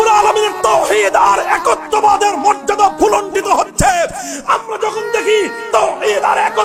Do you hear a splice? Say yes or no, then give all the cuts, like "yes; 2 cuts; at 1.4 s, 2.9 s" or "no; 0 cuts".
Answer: no; 0 cuts